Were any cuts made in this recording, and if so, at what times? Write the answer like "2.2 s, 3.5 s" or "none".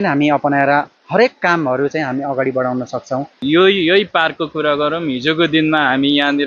3.4 s